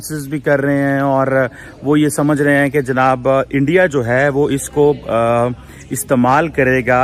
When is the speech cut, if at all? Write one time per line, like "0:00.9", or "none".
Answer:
none